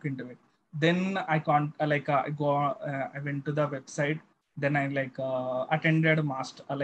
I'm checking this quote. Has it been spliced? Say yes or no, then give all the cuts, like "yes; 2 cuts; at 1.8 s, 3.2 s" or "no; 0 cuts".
no; 0 cuts